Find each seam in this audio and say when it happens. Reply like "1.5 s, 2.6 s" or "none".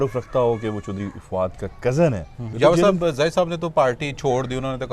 2.5 s